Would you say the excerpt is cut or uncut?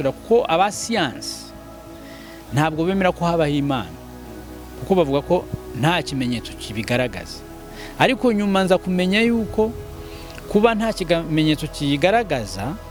uncut